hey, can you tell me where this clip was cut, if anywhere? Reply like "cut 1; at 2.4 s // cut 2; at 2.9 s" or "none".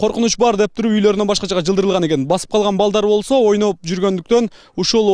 cut 1; at 3.5 s